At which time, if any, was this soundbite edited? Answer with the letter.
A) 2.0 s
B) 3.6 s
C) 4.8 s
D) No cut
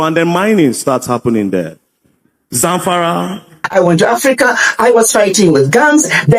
B